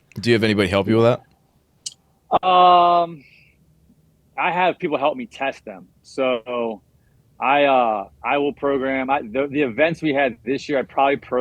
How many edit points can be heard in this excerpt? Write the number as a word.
zero